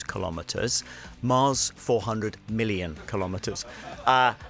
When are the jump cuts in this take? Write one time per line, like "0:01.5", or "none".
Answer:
none